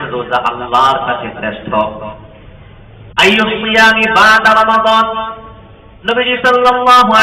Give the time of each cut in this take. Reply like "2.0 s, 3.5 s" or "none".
none